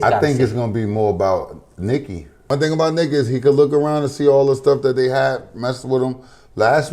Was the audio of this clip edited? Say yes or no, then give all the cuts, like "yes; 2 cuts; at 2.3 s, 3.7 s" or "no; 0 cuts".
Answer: yes; 1 cut; at 2.3 s